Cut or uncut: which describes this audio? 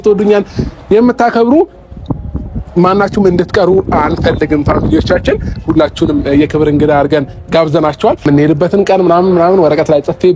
cut